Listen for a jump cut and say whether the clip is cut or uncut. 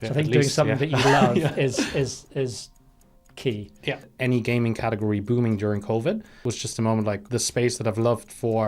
cut